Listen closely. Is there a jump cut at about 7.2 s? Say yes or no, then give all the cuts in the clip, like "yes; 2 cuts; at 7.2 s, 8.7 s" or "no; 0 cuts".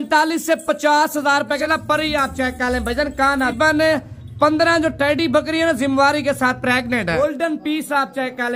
yes; 3 cuts; at 1.6 s, 3.5 s, 7.2 s